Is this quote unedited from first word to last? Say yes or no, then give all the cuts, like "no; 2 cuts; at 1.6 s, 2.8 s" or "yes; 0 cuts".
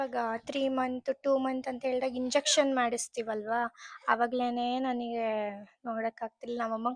yes; 0 cuts